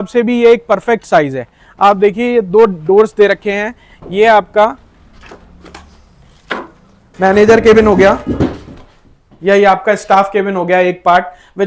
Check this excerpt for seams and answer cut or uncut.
uncut